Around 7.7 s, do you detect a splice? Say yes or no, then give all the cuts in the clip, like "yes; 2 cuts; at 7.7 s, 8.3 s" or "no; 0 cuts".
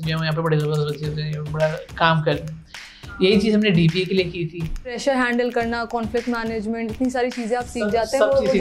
no; 1 cut; at 4.9 s